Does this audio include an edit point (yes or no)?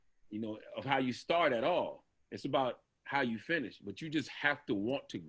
no